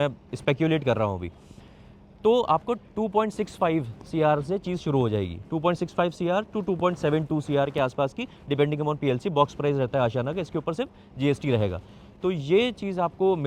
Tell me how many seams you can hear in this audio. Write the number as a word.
zero